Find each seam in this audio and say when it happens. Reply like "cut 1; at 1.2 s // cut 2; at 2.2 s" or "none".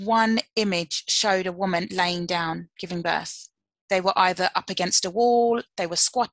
none